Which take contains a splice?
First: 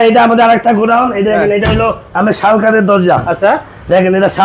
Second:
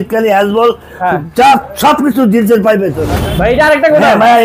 second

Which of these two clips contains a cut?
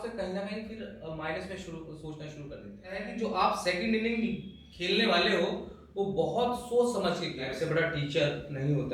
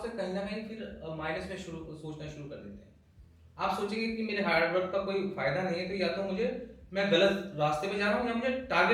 first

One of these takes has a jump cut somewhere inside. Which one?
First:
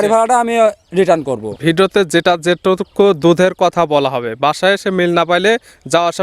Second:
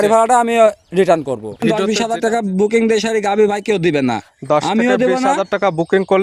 second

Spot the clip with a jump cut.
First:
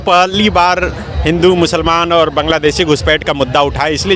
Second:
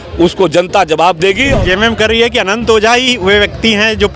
second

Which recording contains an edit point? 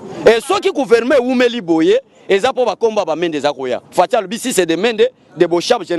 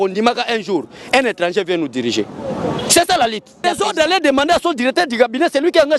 second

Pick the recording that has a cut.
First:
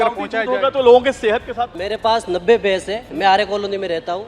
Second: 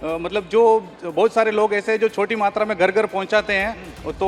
first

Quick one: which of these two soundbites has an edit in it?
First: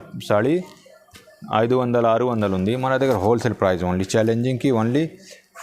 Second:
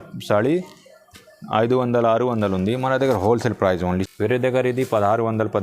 second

